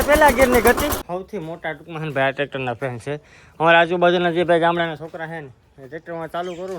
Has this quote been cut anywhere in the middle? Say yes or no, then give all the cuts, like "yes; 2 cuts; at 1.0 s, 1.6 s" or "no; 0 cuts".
yes; 1 cut; at 1.0 s